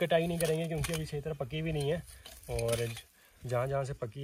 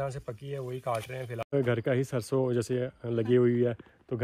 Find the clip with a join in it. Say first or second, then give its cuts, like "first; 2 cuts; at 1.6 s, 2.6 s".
second; 1 cut; at 1.5 s